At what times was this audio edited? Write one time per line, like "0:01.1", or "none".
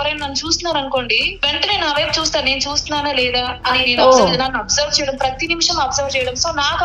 0:01.3